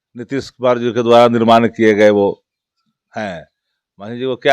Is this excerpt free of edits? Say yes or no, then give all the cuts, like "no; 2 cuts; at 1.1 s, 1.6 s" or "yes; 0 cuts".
yes; 0 cuts